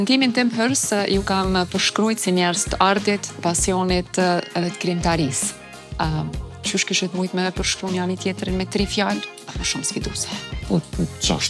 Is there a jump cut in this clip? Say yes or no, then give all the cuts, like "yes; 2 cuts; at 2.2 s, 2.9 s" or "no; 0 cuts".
no; 0 cuts